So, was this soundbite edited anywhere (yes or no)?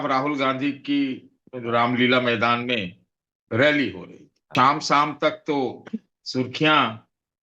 yes